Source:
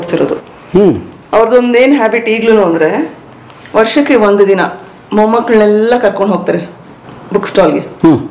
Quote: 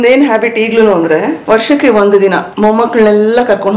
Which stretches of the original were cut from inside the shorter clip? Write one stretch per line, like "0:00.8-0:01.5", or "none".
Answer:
0:03.1-0:03.6
0:04.7-0:05.0